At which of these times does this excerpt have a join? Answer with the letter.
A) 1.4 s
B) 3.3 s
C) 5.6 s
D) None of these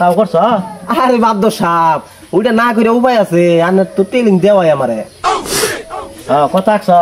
D